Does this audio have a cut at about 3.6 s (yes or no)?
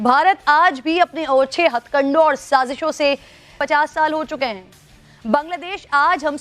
yes